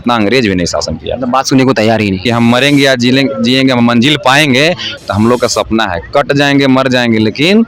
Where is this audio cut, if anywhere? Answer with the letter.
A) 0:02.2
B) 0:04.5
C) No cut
A